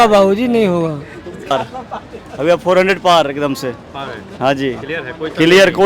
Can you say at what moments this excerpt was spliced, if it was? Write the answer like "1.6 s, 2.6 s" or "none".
1.5 s